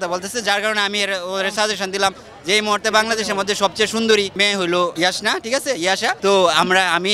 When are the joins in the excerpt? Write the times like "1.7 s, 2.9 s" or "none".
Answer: 4.6 s, 6.2 s